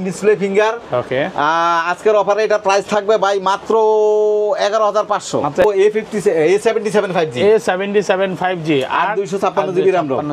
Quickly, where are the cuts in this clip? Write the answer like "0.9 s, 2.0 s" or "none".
5.6 s